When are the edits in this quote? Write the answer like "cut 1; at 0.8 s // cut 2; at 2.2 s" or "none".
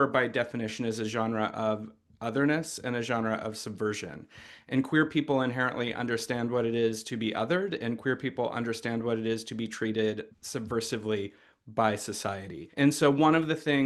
none